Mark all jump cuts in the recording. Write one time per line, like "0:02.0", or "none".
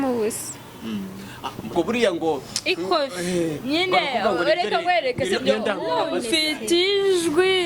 0:01.7